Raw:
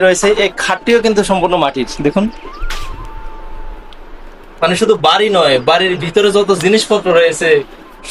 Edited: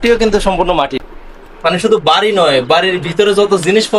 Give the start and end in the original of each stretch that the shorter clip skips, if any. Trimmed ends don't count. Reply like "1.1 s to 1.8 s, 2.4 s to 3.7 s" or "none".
1.9 s to 4.0 s